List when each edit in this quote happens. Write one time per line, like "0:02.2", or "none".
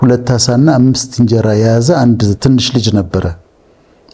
none